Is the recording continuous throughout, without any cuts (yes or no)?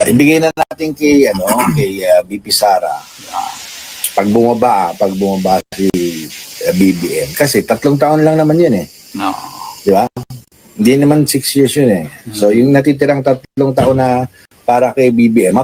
yes